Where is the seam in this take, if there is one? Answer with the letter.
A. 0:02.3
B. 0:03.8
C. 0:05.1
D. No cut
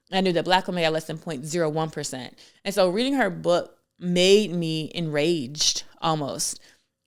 D